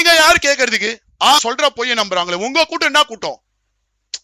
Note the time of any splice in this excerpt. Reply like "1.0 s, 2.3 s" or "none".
1.4 s